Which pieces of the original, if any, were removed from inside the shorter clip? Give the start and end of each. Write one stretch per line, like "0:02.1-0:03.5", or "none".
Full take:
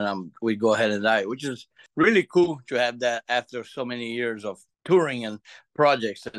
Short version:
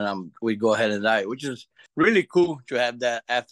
none